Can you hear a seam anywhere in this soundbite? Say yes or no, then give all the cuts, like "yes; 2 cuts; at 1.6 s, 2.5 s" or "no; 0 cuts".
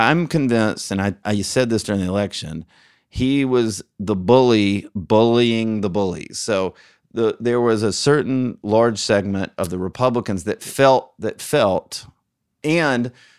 yes; 2 cuts; at 1.2 s, 12.6 s